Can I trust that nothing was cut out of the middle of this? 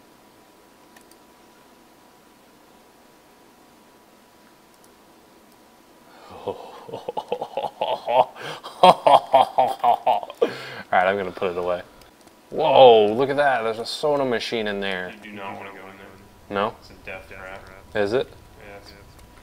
no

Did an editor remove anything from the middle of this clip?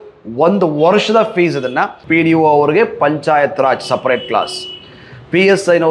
yes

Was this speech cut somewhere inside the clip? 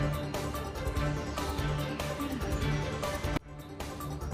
no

